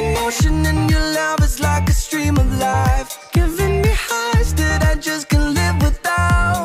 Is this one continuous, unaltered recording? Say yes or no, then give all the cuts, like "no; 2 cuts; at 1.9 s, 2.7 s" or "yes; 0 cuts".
yes; 0 cuts